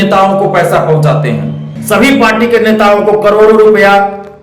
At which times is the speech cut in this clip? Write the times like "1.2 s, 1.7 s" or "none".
1.7 s